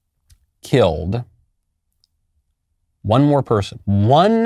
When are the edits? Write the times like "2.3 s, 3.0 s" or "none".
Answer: none